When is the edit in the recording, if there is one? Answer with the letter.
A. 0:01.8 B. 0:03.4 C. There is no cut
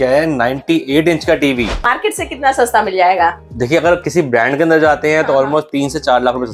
A